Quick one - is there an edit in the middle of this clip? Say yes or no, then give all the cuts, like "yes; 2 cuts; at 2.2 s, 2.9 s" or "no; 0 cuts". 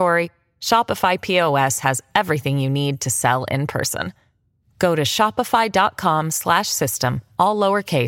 no; 0 cuts